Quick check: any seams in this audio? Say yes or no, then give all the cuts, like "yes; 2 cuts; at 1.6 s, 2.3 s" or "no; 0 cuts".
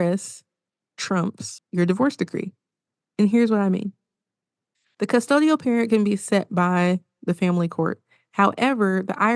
yes; 1 cut; at 1.5 s